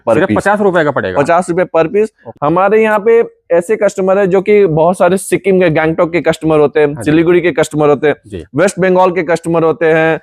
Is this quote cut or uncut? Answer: cut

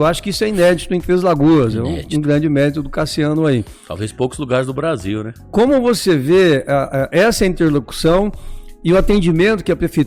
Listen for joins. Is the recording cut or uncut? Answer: uncut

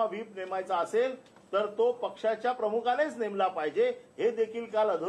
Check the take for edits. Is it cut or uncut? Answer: uncut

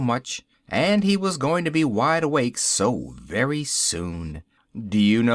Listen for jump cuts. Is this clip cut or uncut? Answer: uncut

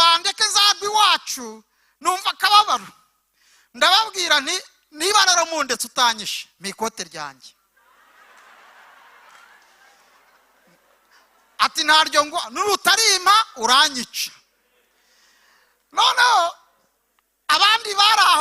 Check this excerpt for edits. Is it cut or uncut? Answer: uncut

